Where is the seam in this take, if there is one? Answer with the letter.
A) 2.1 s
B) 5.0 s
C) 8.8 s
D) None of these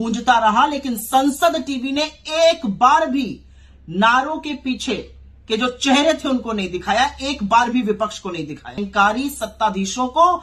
C